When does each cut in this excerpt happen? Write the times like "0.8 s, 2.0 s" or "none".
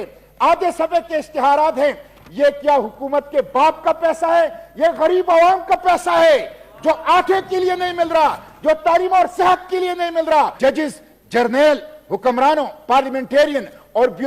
10.6 s